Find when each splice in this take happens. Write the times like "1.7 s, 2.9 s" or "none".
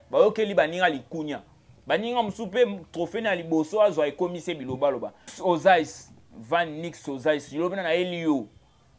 5.3 s